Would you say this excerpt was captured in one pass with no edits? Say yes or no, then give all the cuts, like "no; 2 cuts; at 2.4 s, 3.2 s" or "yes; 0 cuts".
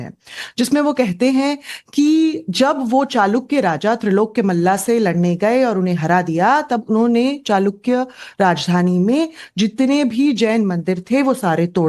no; 1 cut; at 9.9 s